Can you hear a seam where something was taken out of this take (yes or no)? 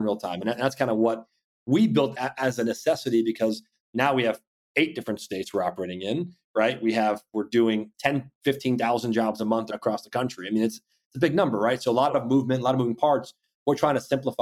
yes